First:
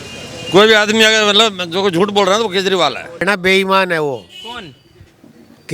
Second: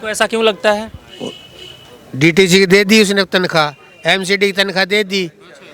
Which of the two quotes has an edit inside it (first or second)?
first